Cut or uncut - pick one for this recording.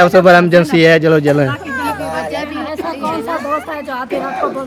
uncut